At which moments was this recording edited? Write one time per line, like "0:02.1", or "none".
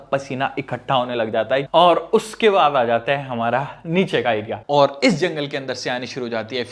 0:01.7
0:04.5